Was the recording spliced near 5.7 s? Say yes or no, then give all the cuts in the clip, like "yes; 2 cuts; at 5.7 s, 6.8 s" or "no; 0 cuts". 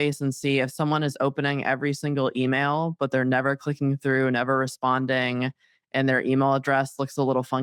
no; 0 cuts